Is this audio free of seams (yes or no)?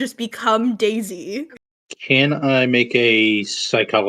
no